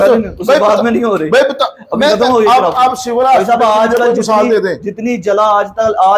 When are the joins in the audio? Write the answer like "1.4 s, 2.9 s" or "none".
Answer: none